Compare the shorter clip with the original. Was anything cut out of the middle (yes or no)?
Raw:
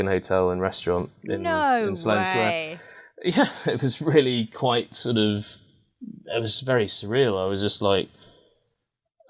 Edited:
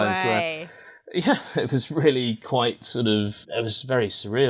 yes